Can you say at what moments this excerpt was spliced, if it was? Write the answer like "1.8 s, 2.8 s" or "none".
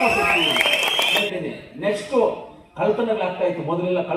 1.2 s